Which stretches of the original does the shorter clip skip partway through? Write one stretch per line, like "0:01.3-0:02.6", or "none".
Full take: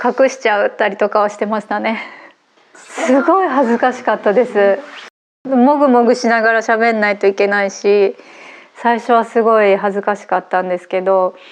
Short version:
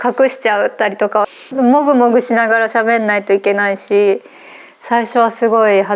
0:01.4-0:05.3